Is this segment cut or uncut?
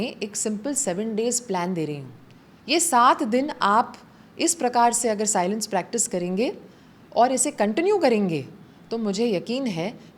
uncut